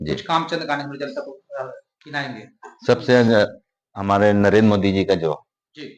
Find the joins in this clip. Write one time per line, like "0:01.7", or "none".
none